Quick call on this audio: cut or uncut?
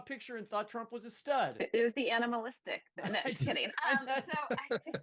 cut